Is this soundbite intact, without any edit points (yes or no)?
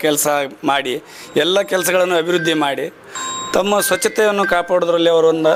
yes